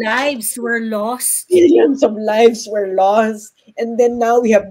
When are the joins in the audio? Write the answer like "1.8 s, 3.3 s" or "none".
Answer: none

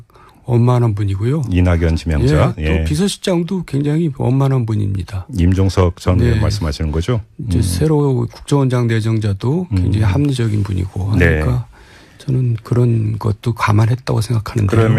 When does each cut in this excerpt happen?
10.9 s

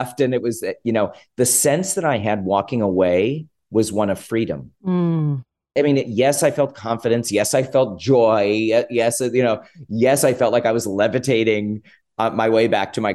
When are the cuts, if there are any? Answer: 3.5 s, 5.7 s

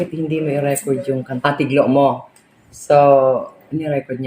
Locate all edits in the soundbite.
1.3 s

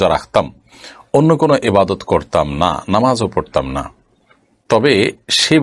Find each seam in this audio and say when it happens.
none

